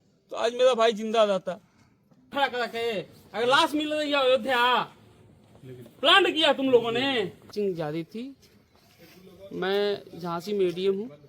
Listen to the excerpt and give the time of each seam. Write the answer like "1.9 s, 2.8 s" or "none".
2.3 s, 7.4 s